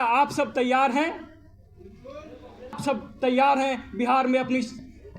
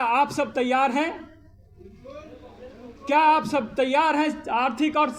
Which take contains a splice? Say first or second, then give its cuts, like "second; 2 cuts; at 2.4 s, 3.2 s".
first; 1 cut; at 2.8 s